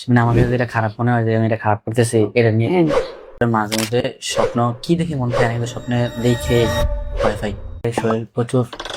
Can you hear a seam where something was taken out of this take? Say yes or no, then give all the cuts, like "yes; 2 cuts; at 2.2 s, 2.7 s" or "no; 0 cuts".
yes; 2 cuts; at 3.3 s, 7.8 s